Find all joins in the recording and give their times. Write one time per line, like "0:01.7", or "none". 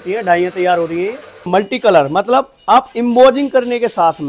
0:01.5